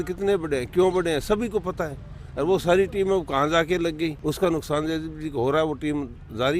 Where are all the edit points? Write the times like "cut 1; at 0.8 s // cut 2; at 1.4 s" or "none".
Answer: cut 1; at 4.2 s